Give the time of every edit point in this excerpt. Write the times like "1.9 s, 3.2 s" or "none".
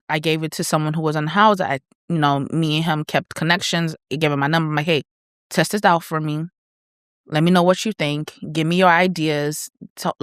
none